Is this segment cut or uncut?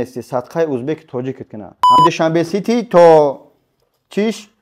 cut